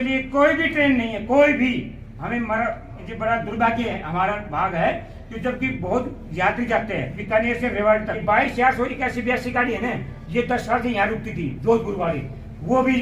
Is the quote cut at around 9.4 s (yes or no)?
no